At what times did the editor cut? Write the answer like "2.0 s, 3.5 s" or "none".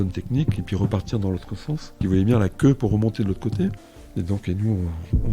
2.0 s